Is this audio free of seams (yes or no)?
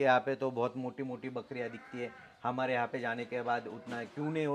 yes